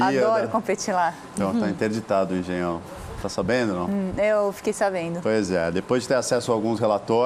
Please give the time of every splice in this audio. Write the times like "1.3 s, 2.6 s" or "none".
none